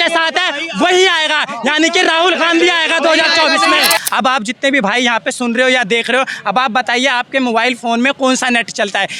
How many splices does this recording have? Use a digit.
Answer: 1